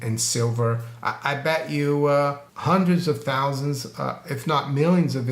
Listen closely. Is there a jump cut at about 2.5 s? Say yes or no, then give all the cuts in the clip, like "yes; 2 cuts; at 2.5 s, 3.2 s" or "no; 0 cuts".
yes; 1 cut; at 2.5 s